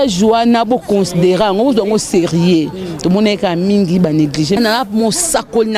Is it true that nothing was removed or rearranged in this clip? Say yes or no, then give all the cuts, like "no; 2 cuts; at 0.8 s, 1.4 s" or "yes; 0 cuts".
no; 1 cut; at 4.6 s